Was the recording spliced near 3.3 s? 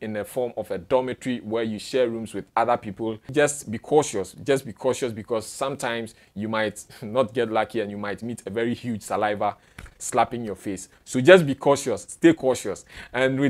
yes; 1 cut; at 3.3 s

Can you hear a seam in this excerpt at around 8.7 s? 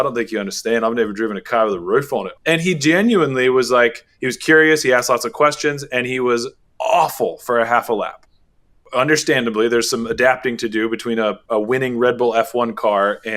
yes; 3 cuts; at 2.3 s, 6.6 s, 8.7 s

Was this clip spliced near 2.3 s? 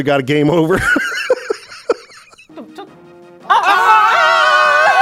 yes; 1 cut; at 2.3 s

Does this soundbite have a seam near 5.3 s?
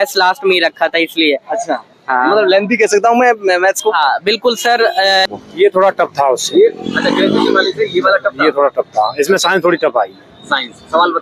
yes; 1 cut; at 5.3 s

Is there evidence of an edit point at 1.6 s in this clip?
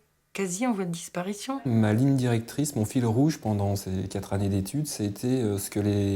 yes; 1 cut; at 1.6 s

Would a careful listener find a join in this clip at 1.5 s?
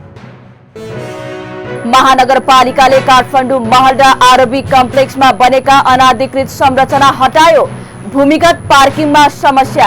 yes; 1 cut; at 1.5 s

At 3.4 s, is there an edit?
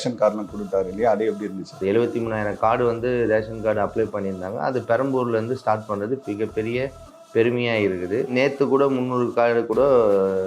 no; 2 cuts; at 1.8 s, 8.3 s

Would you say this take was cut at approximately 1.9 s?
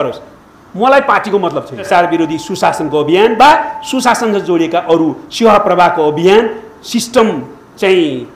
yes; 1 cut; at 1.9 s

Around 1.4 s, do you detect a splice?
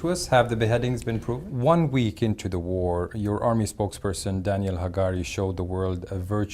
yes; 1 cut; at 1.4 s

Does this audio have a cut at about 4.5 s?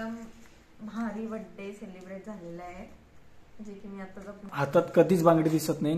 yes; 1 cut; at 4.5 s

